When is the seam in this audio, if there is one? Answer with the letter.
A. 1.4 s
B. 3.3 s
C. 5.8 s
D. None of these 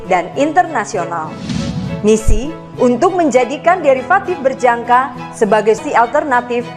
C